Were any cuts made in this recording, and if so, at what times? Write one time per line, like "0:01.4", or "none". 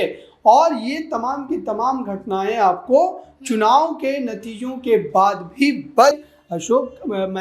0:06.2